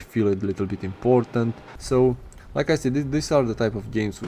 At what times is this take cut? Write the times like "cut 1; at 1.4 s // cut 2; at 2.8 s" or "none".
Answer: cut 1; at 1.7 s